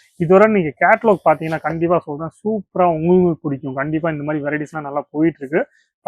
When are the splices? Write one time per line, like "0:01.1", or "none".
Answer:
none